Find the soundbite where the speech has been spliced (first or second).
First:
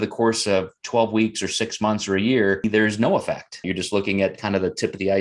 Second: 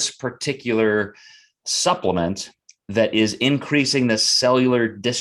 first